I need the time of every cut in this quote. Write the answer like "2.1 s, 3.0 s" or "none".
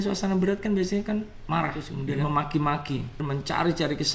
1.9 s, 3.2 s